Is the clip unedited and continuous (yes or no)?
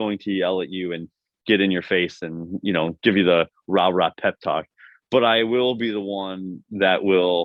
yes